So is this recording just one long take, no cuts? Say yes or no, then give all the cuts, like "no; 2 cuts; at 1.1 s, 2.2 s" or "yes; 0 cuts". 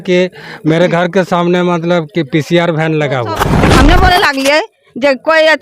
no; 1 cut; at 3.6 s